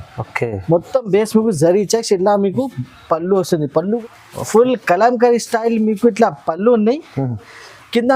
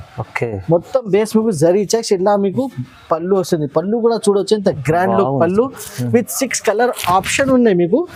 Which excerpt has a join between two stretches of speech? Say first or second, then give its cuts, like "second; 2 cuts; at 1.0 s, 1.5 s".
first; 1 cut; at 4.0 s